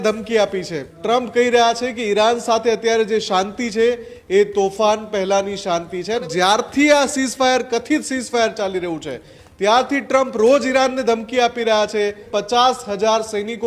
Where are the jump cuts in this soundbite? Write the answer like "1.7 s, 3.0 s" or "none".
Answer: 1.0 s, 6.2 s, 12.3 s